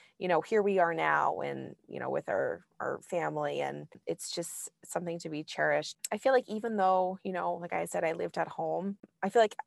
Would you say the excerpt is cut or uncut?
cut